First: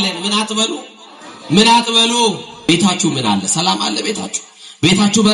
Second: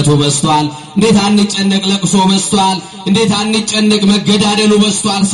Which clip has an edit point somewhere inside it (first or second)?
first